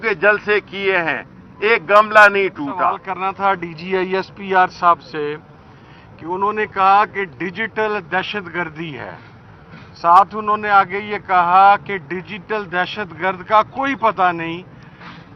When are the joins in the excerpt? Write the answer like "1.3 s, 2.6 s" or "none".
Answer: 3.1 s